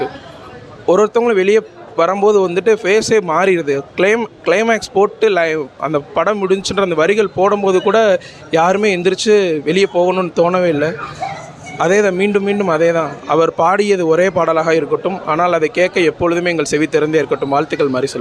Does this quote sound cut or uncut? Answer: uncut